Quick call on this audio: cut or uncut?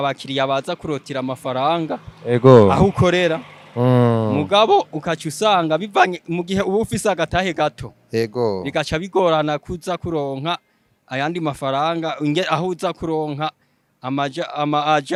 uncut